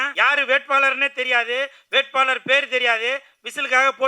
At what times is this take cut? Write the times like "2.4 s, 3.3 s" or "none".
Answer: none